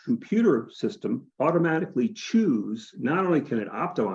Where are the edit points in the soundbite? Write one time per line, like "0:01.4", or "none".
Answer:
0:01.3
0:02.9